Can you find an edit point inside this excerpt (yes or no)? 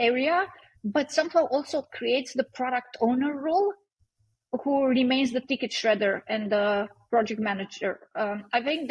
no